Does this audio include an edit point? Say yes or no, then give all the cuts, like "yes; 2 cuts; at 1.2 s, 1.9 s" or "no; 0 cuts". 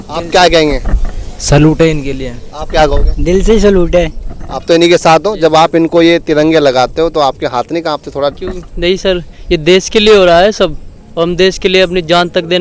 no; 0 cuts